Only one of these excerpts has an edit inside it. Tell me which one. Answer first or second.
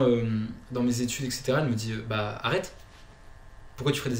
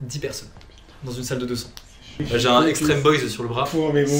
second